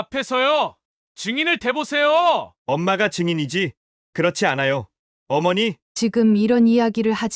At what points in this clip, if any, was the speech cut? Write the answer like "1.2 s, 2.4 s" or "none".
5.8 s